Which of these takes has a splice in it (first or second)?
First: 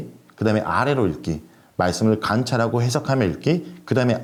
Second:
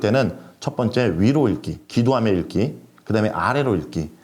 second